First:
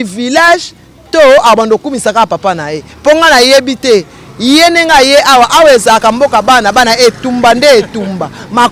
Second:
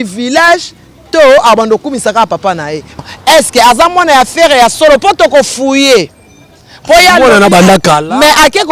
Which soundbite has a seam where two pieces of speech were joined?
second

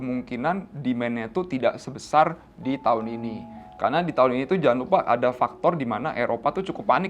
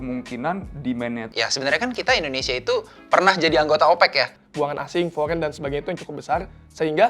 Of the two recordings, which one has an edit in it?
second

